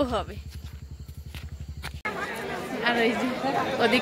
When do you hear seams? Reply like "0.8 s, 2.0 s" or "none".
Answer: 2.0 s